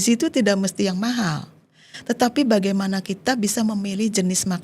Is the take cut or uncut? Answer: uncut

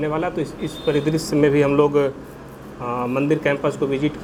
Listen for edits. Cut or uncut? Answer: uncut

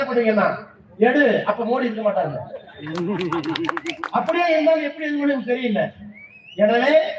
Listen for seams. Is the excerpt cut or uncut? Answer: uncut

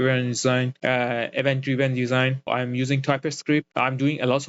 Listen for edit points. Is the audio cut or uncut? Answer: cut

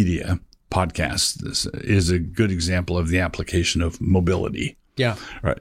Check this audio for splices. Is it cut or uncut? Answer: uncut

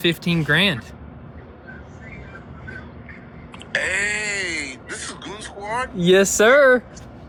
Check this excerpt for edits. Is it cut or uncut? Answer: uncut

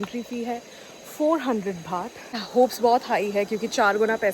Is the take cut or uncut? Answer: cut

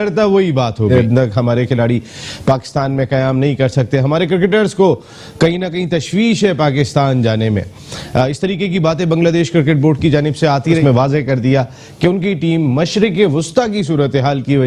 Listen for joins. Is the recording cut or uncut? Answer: cut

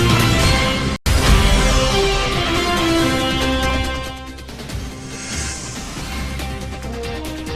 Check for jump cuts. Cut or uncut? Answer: uncut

